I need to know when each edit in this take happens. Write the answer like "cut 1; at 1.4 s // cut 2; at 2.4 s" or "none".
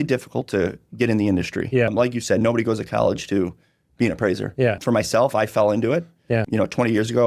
cut 1; at 1.9 s // cut 2; at 4.8 s // cut 3; at 6.4 s